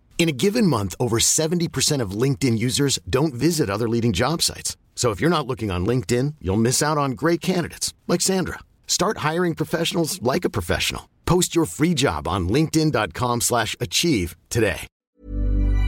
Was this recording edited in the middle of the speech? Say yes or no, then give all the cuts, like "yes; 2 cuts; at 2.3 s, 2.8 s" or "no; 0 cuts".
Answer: yes; 1 cut; at 14.9 s